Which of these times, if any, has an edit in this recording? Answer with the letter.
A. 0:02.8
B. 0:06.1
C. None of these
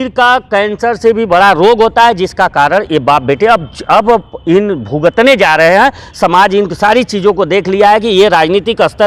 C